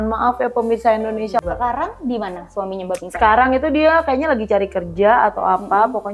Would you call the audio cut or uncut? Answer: cut